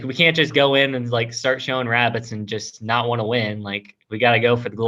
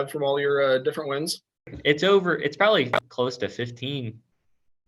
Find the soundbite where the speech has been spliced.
second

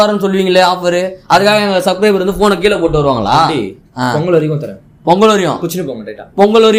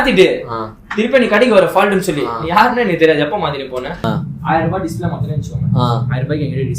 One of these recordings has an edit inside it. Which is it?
second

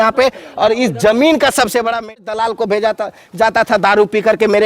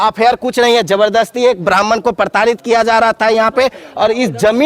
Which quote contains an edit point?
first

